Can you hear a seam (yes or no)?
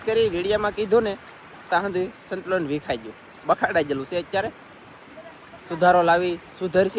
no